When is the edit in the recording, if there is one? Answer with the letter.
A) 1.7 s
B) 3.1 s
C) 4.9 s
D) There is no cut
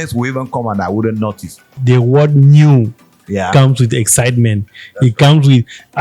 A